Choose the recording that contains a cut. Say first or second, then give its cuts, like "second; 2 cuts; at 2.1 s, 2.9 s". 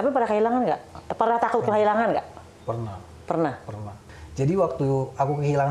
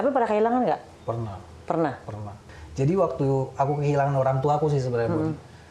second; 1 cut; at 1.0 s